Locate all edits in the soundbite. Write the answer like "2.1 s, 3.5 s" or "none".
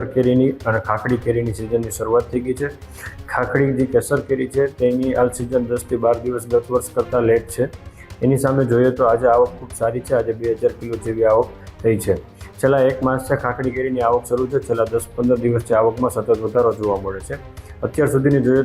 none